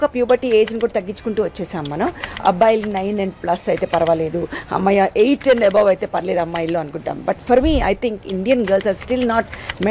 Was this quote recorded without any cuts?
yes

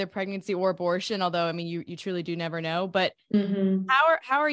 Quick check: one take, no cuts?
yes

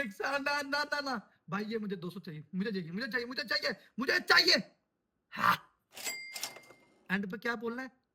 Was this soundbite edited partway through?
no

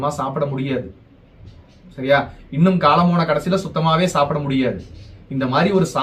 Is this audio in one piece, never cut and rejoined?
yes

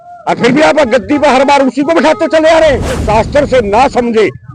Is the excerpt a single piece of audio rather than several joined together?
no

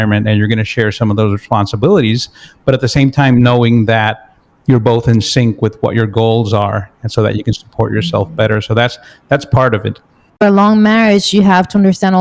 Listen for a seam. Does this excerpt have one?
yes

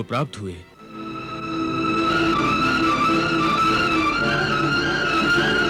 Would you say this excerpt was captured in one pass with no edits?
yes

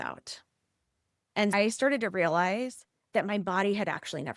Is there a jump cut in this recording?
yes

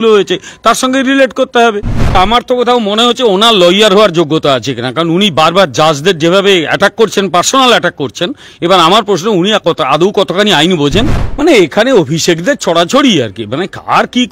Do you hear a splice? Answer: yes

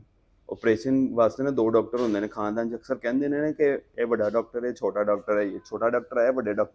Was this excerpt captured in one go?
yes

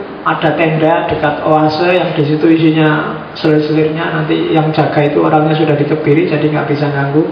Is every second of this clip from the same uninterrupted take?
yes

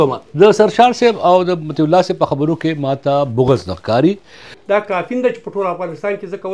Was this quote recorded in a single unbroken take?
no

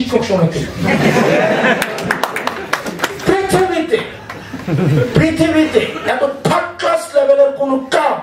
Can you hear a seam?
no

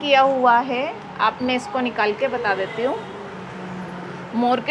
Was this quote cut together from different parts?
no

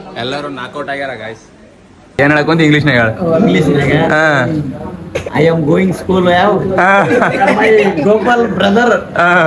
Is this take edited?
yes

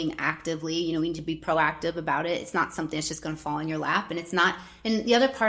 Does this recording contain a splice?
no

